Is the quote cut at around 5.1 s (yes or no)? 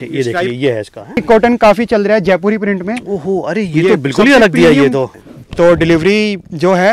yes